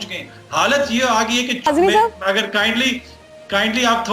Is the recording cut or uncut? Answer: cut